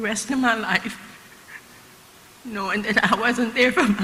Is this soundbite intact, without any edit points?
yes; 0 cuts

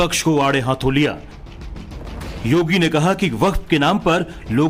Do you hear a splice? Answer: no; 0 cuts

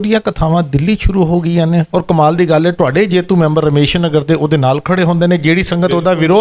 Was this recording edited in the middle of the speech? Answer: no; 0 cuts

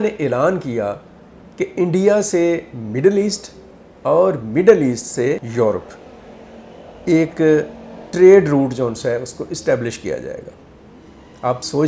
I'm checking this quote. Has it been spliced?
no; 0 cuts

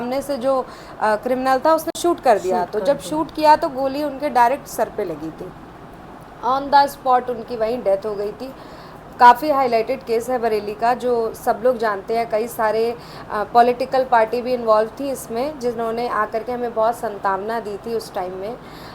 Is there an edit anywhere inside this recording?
no; 0 cuts

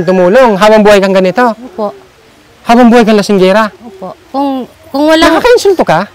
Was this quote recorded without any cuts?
yes; 0 cuts

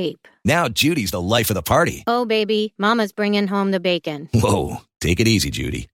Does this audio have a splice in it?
no; 0 cuts

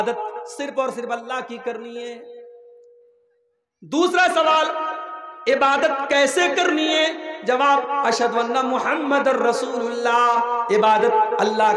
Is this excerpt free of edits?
yes; 0 cuts

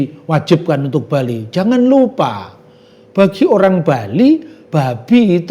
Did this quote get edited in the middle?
no; 0 cuts

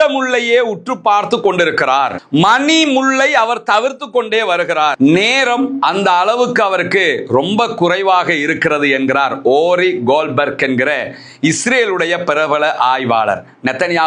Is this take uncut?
yes; 0 cuts

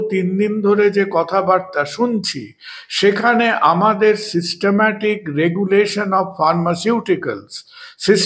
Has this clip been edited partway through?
no; 0 cuts

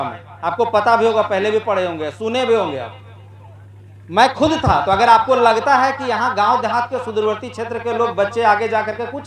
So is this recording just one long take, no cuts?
yes; 0 cuts

